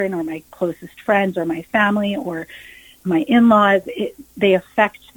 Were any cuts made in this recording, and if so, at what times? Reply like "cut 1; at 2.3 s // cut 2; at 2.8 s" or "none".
cut 1; at 3.0 s